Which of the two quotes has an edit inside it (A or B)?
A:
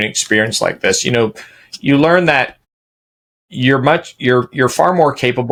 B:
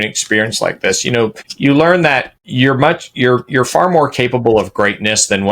B